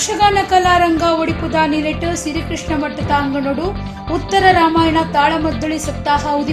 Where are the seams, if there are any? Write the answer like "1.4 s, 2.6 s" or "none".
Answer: none